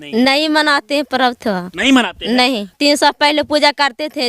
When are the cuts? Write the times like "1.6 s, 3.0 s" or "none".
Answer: 2.7 s